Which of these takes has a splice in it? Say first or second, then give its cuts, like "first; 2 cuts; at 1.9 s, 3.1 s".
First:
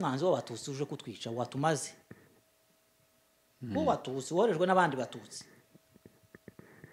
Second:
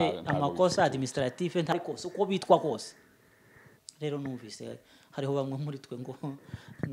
second; 1 cut; at 1.7 s